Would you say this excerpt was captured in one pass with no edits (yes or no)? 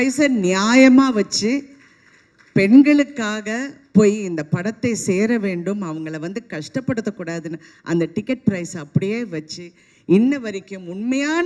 yes